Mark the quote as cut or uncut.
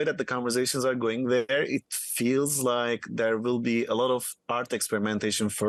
uncut